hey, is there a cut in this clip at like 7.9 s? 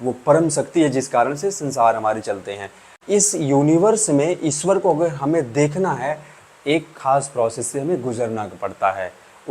no; 1 cut; at 3.0 s

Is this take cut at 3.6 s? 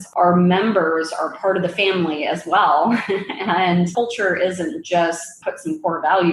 no; 0 cuts

